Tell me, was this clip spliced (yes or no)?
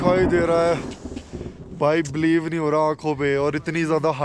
no